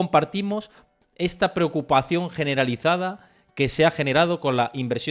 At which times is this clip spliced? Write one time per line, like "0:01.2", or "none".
none

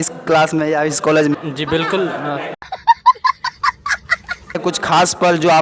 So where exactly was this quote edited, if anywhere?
0:01.3
0:02.5
0:04.6

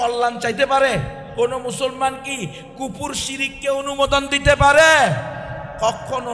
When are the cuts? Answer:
0:01.2

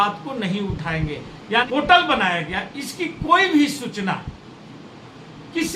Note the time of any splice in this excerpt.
0:01.7

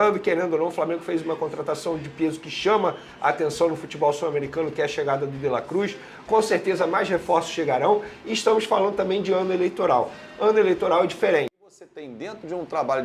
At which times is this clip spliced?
0:11.9

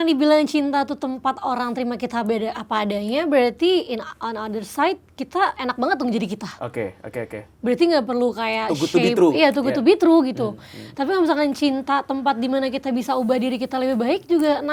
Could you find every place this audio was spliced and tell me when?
none

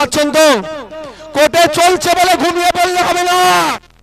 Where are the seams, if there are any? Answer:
none

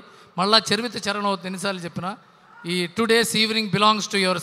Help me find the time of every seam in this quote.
none

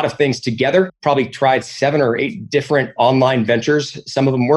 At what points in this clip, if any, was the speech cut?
0:00.9

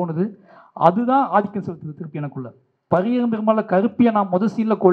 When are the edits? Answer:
0:02.9

